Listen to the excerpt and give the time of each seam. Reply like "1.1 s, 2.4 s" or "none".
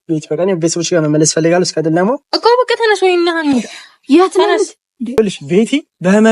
5.2 s